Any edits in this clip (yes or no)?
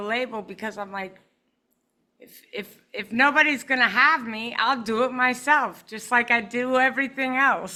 no